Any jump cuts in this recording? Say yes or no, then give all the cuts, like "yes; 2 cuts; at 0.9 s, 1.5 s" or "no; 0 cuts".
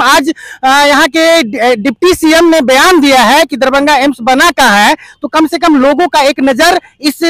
no; 0 cuts